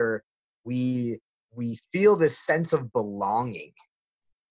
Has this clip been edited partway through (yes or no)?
no